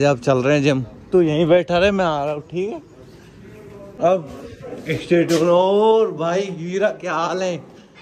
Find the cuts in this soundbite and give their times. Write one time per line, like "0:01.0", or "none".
0:03.8